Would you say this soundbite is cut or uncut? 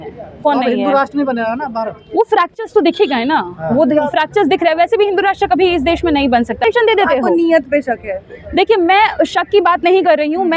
cut